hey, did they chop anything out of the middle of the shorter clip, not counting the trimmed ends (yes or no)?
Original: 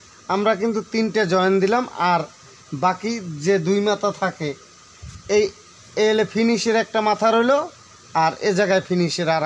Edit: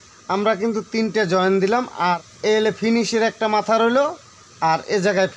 yes